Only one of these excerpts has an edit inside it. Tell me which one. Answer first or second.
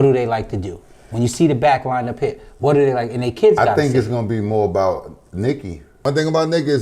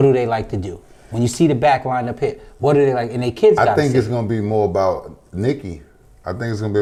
first